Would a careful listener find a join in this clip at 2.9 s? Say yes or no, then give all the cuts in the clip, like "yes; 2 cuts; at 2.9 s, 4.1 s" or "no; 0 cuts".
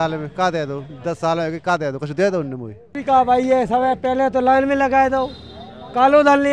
yes; 1 cut; at 2.9 s